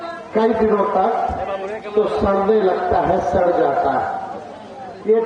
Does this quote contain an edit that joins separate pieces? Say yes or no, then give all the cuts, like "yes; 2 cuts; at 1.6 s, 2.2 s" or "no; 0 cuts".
no; 0 cuts